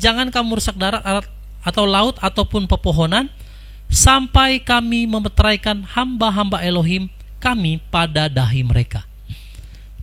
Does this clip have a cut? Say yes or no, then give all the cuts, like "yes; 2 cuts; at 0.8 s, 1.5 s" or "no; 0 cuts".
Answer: no; 0 cuts